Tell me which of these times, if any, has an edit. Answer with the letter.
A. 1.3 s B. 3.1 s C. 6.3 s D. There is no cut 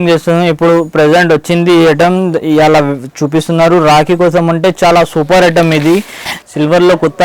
C